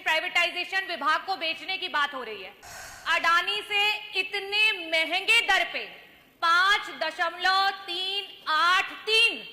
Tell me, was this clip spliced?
no; 0 cuts

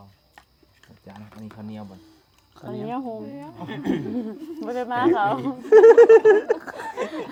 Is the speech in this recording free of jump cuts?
yes; 0 cuts

